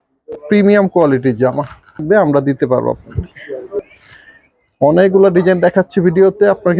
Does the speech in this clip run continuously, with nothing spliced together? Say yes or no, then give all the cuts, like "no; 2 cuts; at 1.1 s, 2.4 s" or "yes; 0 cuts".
no; 3 cuts; at 2.0 s, 3.1 s, 3.9 s